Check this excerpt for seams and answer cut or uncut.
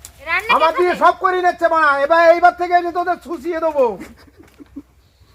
uncut